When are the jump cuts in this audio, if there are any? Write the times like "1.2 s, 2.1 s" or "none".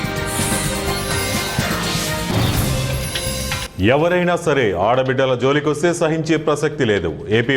3.7 s